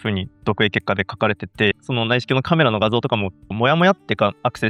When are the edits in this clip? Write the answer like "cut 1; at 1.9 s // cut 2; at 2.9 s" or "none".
cut 1; at 1.8 s // cut 2; at 3.5 s